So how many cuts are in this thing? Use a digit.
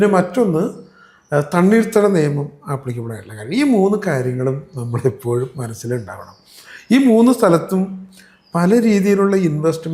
0